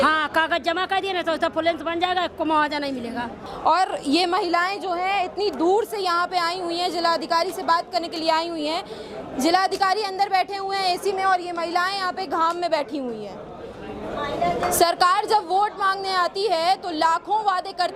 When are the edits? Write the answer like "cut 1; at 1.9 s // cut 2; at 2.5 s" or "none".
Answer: cut 1; at 3.4 s

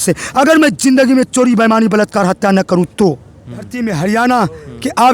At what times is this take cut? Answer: cut 1; at 3.7 s

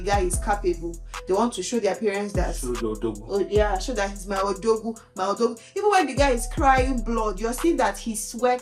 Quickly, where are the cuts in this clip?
none

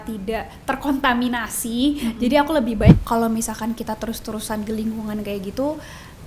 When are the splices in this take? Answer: cut 1; at 2.9 s

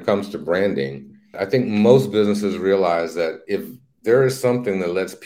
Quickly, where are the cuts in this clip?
cut 1; at 1.4 s

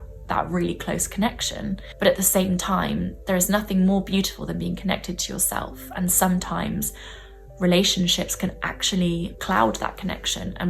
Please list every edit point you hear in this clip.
cut 1; at 1.9 s

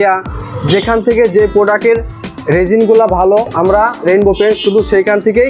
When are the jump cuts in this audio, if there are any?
cut 1; at 3.5 s

